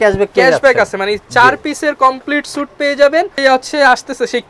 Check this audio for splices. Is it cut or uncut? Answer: cut